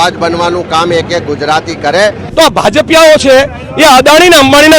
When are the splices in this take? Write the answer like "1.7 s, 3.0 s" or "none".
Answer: 2.2 s

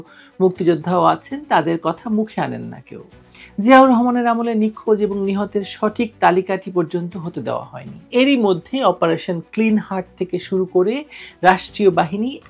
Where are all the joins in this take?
8.1 s

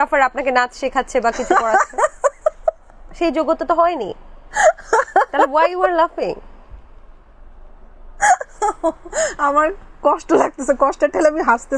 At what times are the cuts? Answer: none

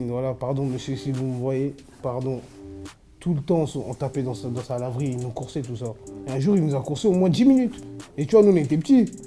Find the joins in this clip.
none

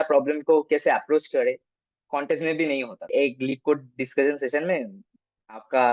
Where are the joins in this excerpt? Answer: 3.1 s

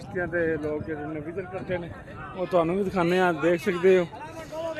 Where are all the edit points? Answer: none

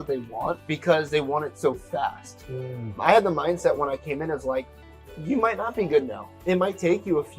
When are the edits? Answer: none

